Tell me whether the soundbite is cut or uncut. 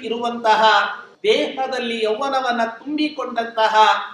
cut